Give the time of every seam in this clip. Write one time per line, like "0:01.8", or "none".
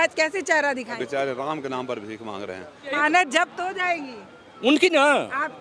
0:01.0
0:03.0